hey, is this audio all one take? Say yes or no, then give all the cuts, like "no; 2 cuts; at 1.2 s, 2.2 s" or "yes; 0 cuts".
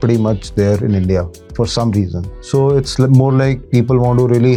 yes; 0 cuts